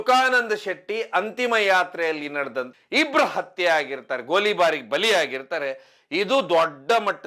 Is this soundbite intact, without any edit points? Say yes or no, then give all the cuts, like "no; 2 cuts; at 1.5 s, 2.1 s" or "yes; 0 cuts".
no; 1 cut; at 2.7 s